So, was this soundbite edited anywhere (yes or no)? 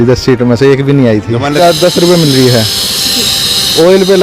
yes